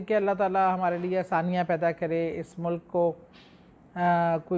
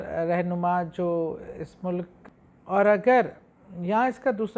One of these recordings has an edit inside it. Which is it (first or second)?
second